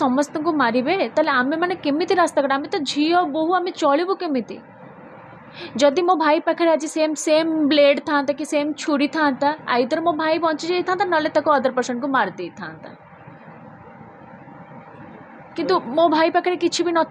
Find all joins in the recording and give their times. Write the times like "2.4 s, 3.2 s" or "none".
none